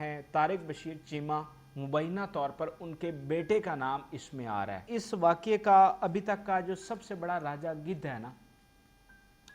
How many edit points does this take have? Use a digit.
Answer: 1